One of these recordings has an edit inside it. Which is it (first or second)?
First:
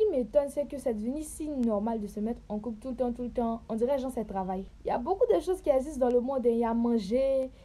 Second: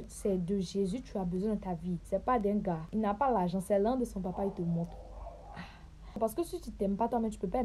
second